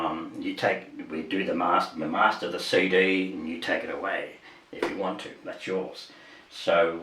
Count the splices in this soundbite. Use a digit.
0